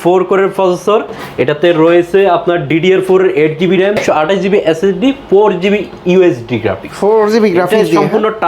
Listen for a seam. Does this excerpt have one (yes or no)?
no